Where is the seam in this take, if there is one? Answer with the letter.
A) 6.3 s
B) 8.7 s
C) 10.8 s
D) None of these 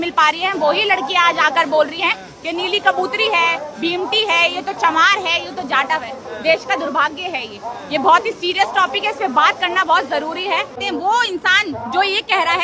C